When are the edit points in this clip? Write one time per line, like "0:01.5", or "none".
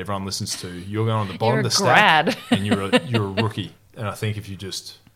0:03.8